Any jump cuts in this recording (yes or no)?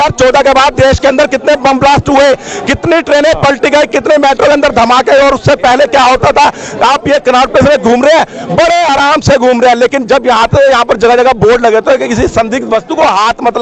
no